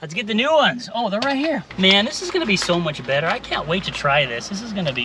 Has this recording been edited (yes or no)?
no